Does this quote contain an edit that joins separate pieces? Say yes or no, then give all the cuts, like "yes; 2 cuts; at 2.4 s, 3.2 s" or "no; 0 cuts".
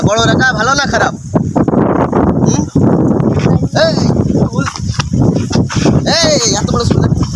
no; 0 cuts